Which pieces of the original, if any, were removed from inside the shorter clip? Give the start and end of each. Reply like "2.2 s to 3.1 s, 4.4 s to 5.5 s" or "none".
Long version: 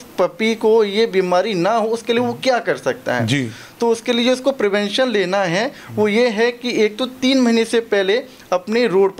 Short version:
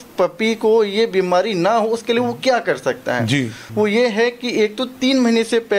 3.6 s to 5.8 s